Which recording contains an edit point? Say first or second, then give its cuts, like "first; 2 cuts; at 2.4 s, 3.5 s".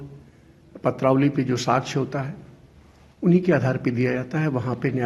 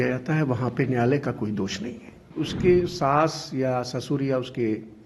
second; 1 cut; at 2.3 s